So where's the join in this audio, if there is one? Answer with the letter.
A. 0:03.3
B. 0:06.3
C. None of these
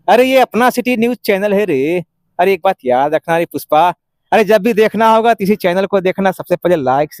C